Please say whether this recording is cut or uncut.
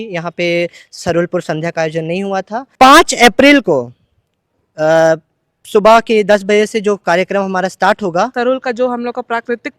cut